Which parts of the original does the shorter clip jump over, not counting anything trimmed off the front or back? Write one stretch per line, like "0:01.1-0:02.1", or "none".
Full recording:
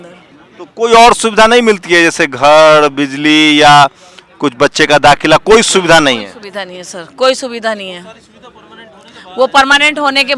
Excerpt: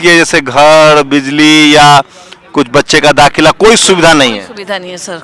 none